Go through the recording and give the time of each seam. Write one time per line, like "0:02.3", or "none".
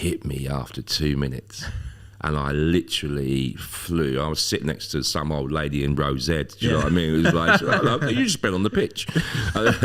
none